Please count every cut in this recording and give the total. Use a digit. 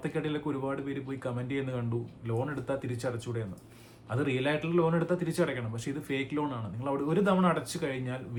0